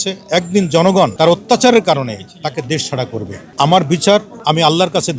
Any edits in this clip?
yes; 3 cuts; at 1.1 s, 3.4 s, 4.3 s

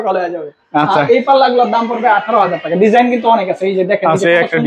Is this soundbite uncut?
yes; 0 cuts

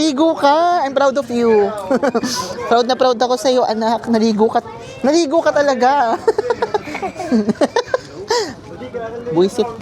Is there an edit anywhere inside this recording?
no; 0 cuts

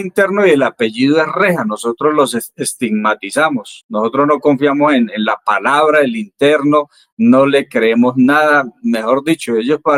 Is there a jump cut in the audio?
no; 0 cuts

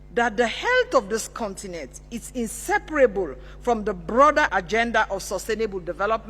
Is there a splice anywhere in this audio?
yes; 1 cut; at 4.5 s

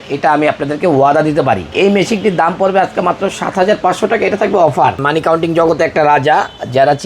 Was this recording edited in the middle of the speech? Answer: yes; 2 cuts; at 1.7 s, 5.0 s

